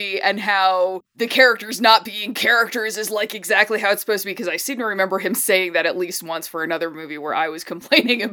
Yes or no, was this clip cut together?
yes